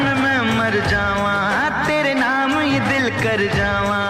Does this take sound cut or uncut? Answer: uncut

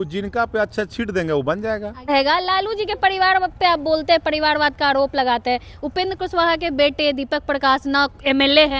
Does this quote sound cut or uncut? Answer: cut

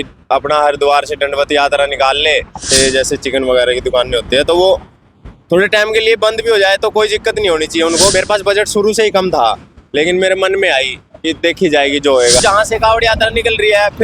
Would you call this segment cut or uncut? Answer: cut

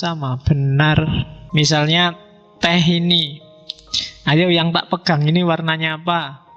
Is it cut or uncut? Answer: cut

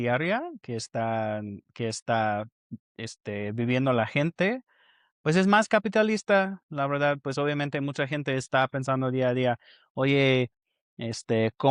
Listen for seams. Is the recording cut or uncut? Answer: uncut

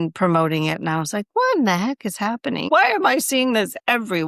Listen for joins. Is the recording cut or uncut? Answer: cut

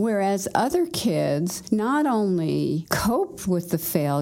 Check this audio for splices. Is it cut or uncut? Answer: cut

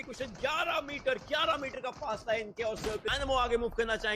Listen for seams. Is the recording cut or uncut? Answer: cut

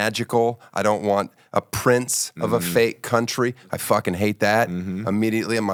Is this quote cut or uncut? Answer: uncut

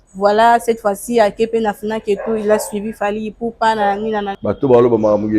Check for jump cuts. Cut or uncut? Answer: cut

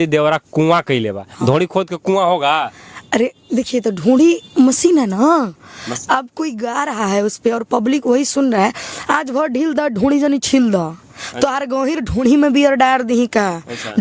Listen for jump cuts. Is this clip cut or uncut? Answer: uncut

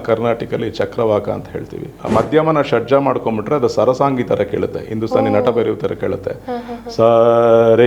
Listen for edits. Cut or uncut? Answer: cut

